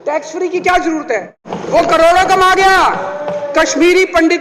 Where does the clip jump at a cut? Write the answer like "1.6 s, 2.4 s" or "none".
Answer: 1.5 s